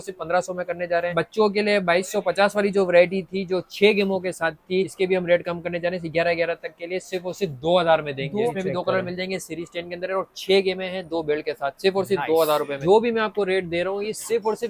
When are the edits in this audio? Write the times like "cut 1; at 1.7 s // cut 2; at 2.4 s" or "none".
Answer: cut 1; at 1.1 s // cut 2; at 4.9 s // cut 3; at 8.5 s // cut 4; at 12.7 s